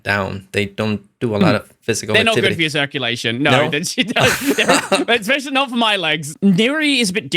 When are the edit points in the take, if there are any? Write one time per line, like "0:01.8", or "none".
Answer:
0:06.3